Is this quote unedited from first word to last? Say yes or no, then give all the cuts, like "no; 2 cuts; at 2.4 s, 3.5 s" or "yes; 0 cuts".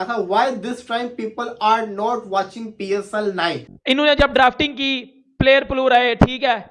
no; 1 cut; at 3.7 s